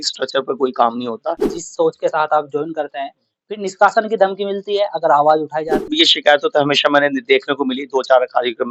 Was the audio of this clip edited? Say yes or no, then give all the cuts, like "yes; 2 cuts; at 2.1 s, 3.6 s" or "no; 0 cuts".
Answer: yes; 2 cuts; at 1.6 s, 5.9 s